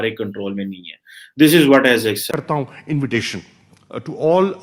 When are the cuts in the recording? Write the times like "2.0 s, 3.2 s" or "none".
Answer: 2.3 s